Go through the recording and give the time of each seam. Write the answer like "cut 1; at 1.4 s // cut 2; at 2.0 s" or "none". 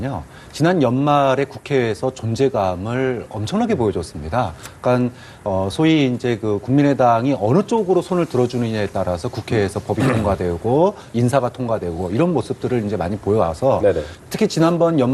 cut 1; at 1.1 s